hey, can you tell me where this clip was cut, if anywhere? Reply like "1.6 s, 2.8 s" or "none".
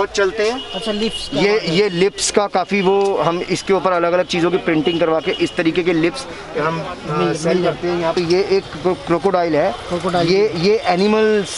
8.2 s